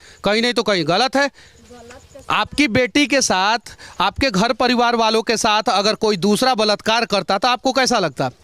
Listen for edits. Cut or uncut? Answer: uncut